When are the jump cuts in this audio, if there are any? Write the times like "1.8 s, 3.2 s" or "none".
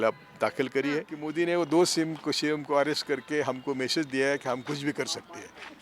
1.2 s